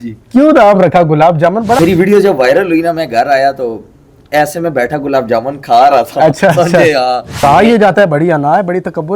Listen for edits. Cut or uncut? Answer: cut